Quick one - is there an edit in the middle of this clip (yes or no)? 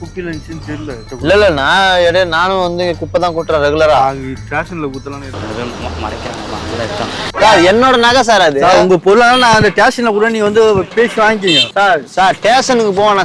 yes